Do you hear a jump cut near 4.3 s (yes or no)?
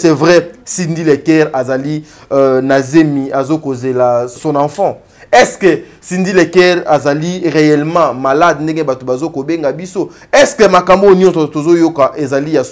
yes